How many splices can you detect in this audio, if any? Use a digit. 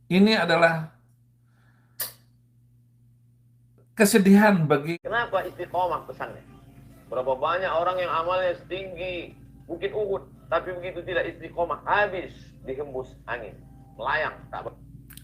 1